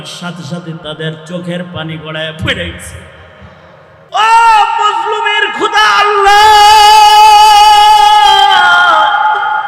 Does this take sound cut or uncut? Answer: cut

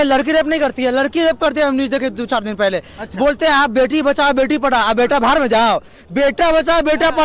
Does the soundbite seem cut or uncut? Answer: uncut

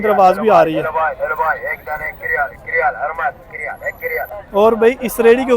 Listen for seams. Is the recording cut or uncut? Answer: cut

